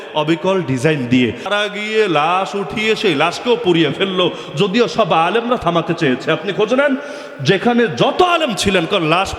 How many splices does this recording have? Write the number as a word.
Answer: one